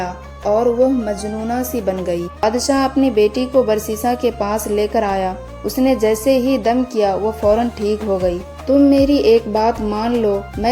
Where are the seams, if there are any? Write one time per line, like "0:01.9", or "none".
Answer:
0:02.4
0:08.5